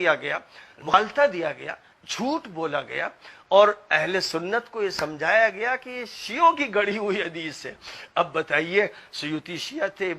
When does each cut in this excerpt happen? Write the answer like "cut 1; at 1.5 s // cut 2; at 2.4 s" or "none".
cut 1; at 0.9 s